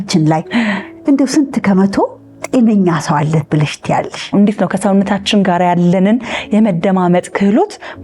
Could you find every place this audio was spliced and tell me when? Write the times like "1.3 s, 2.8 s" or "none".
4.3 s